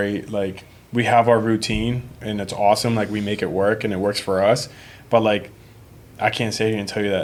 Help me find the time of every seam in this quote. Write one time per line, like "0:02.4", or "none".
none